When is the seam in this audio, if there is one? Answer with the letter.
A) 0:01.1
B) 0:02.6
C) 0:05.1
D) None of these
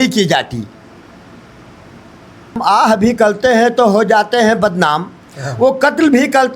B